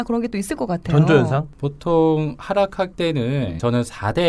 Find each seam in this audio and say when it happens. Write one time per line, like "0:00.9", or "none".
0:01.5
0:03.2